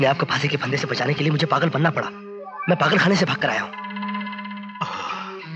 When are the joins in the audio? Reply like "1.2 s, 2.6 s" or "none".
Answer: none